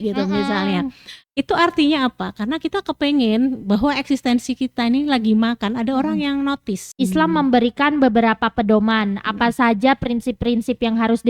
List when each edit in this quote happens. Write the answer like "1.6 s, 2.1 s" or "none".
6.8 s